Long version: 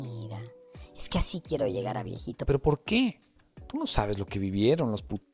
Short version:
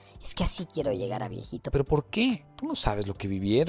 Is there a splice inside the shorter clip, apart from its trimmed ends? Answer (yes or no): yes